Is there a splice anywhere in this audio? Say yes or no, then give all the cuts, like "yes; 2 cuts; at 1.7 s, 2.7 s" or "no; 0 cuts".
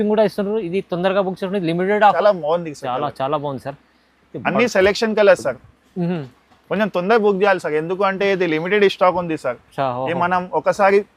yes; 1 cut; at 2.1 s